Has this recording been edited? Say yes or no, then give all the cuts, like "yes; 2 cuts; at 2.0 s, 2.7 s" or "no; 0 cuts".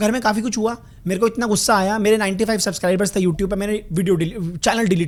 no; 0 cuts